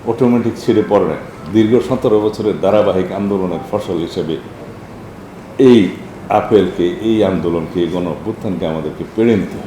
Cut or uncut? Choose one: uncut